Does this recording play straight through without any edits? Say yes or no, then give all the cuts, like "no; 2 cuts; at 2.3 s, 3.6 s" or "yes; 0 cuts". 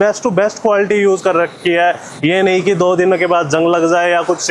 yes; 0 cuts